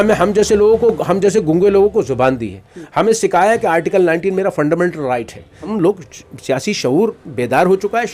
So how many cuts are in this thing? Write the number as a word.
one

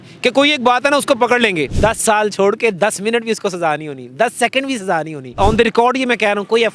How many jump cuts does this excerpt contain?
two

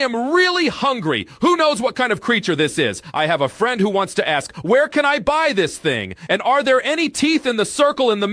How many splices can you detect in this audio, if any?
zero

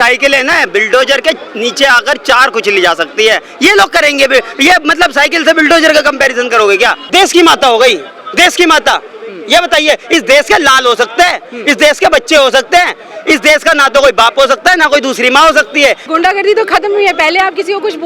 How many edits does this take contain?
two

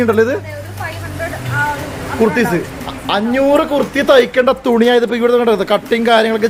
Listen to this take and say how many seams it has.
zero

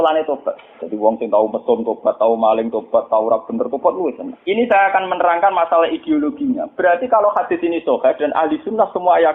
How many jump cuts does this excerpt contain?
one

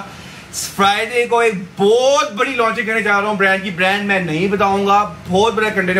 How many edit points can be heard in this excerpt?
zero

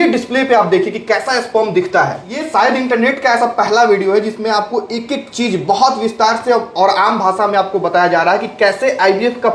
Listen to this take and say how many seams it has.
one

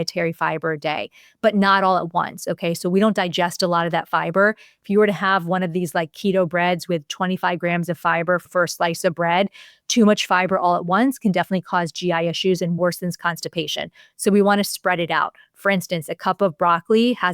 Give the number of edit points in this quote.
one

